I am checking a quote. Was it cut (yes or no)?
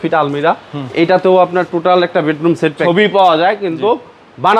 yes